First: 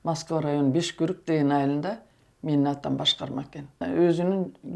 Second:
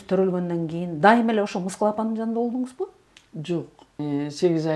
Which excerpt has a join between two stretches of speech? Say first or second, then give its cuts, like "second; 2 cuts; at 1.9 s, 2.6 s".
first; 1 cut; at 3.7 s